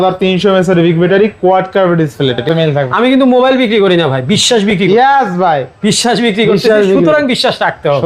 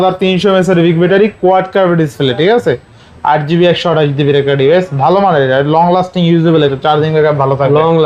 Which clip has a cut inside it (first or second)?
first